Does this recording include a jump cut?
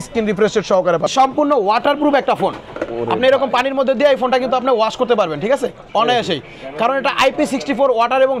yes; 1 cut; at 1.1 s

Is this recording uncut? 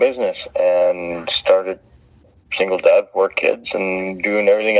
no; 1 cut; at 2.4 s

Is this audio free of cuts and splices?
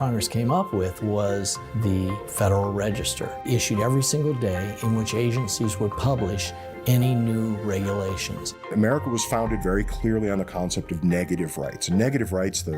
no; 2 cuts; at 3.3 s, 8.7 s

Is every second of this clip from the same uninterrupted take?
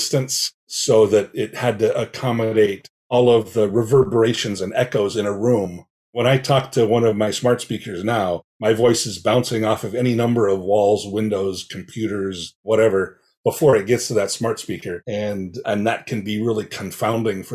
yes; 0 cuts

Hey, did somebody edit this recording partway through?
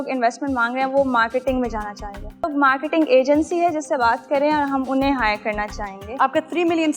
yes; 1 cut; at 2.5 s

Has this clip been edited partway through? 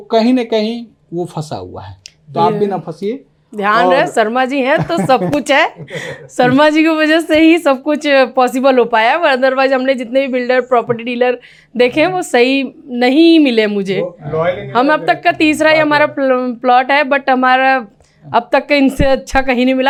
no; 0 cuts

